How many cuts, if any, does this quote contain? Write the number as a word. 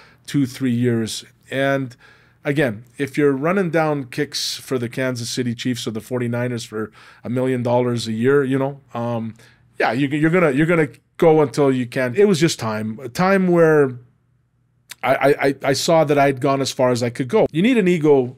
two